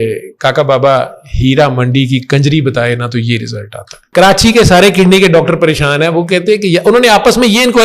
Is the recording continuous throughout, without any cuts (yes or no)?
no